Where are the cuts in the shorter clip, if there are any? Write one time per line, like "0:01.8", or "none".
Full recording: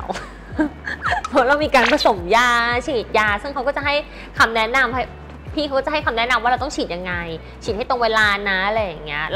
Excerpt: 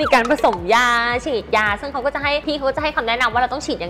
0:02.4